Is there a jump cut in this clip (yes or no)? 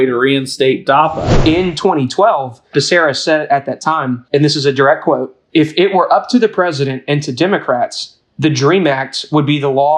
yes